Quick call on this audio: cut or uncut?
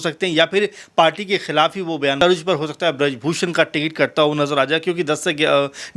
cut